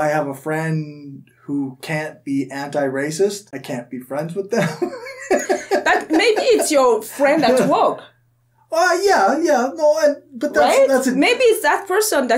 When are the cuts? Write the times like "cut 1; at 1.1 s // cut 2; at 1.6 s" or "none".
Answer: cut 1; at 3.5 s